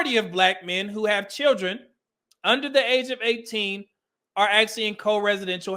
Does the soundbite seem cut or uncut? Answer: uncut